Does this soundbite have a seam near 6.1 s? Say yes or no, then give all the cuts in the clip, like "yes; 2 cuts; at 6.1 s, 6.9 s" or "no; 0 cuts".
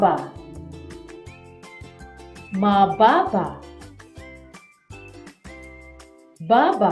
yes; 2 cuts; at 3.6 s, 6.1 s